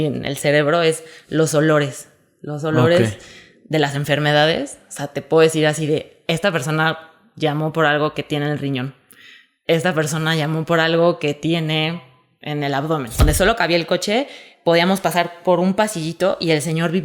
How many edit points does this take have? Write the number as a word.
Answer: one